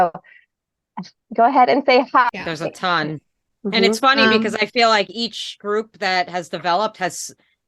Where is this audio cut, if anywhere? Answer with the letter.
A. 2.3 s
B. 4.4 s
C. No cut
A